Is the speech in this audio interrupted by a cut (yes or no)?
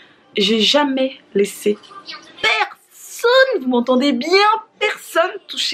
no